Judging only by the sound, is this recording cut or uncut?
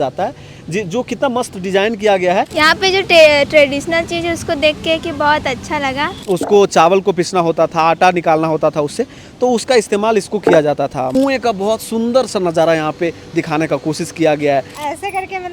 cut